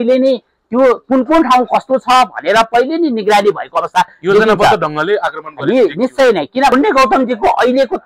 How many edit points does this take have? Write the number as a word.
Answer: one